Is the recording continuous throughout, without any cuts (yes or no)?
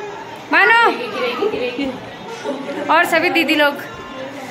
yes